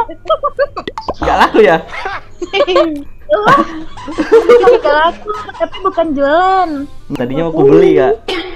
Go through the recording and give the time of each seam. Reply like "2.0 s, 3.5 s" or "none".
7.1 s